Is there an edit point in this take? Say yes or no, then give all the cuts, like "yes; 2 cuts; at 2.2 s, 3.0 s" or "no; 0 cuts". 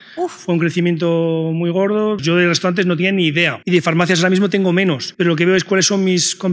yes; 3 cuts; at 2.2 s, 3.6 s, 5.1 s